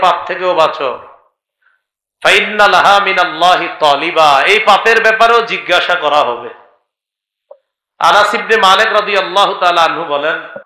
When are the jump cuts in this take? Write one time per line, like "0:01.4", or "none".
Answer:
none